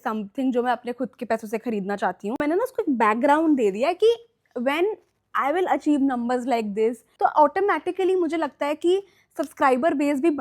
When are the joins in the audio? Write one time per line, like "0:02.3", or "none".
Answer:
0:02.3
0:07.1